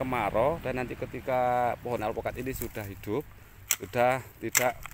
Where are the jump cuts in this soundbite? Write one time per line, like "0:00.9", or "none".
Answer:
none